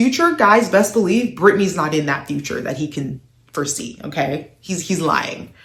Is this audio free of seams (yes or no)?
yes